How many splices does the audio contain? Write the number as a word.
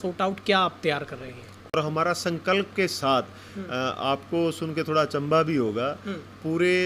one